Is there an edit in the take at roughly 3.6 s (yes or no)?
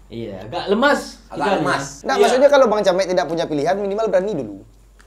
no